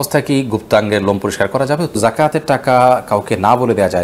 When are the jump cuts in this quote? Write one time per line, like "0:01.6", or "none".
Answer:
0:02.0